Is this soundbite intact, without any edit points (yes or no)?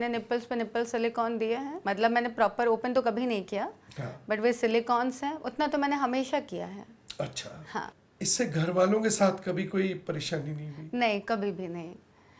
yes